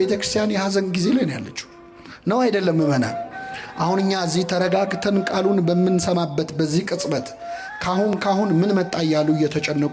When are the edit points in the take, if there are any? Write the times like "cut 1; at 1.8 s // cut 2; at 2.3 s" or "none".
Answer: none